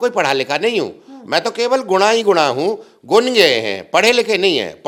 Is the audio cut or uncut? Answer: uncut